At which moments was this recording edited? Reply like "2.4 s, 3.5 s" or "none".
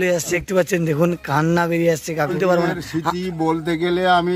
2.0 s